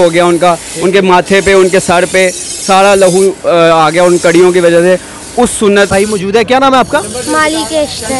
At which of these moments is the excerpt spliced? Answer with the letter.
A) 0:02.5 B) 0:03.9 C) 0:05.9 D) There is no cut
C